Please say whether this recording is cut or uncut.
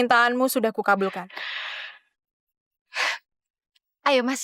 cut